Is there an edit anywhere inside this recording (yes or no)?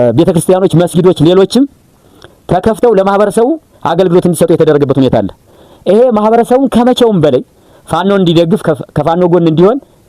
no